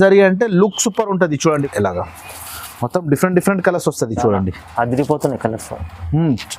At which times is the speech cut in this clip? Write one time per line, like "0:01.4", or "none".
0:01.6